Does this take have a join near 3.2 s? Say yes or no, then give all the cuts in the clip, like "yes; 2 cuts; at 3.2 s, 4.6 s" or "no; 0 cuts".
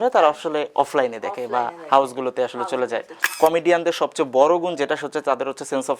yes; 1 cut; at 3.2 s